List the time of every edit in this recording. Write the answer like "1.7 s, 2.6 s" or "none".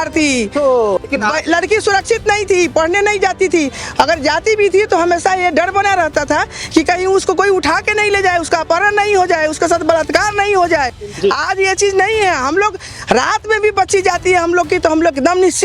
1.0 s

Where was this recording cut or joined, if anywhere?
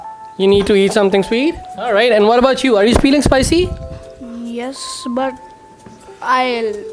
1.7 s

